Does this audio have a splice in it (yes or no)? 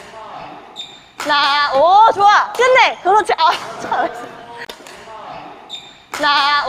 no